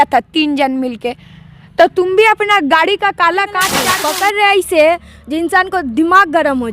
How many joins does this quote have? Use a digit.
1